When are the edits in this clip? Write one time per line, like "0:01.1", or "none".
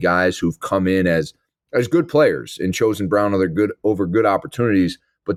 none